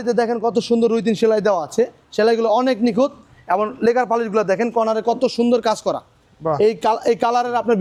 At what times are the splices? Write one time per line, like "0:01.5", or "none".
none